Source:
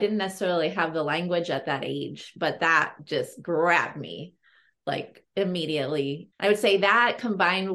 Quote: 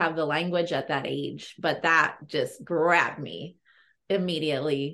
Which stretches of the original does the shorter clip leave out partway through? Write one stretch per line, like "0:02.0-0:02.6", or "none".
0:04.7-0:05.2